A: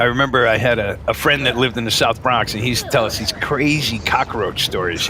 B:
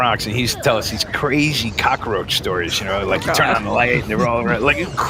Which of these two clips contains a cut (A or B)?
A